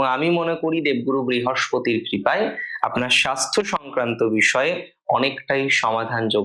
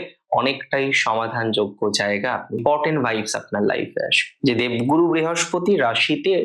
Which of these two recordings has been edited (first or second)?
second